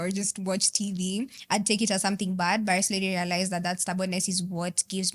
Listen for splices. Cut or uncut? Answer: uncut